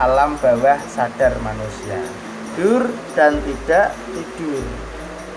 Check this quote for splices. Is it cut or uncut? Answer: cut